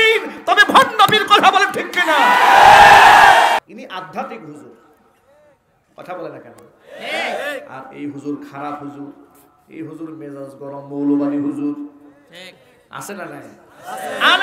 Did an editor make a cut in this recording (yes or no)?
yes